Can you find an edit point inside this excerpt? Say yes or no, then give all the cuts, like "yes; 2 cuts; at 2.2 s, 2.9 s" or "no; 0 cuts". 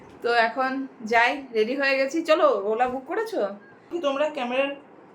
yes; 1 cut; at 3.9 s